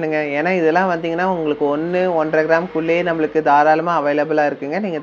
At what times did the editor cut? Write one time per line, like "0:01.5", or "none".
none